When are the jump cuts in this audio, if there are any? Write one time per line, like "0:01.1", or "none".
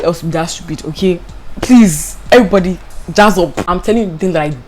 0:03.6